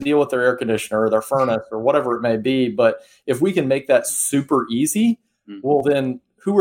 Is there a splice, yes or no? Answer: no